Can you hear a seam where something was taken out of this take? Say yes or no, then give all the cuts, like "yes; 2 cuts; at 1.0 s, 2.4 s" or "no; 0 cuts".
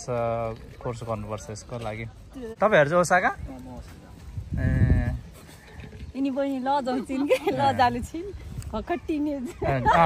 yes; 1 cut; at 2.5 s